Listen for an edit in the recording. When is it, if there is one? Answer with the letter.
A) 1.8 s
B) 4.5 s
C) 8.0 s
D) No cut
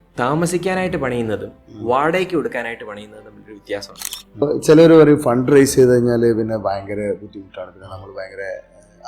B